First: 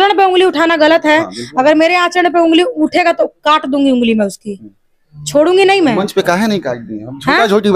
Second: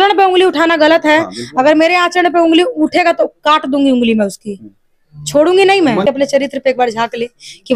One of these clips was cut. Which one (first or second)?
second